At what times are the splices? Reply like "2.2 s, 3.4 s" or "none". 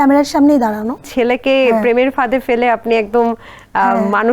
1.1 s